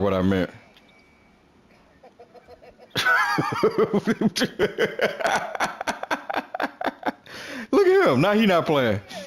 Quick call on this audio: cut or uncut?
cut